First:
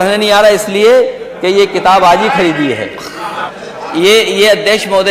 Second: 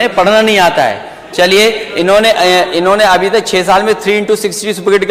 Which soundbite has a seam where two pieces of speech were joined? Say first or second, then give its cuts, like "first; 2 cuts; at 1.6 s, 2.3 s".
first; 1 cut; at 3.4 s